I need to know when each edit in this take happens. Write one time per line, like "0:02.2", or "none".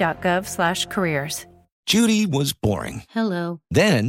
0:01.8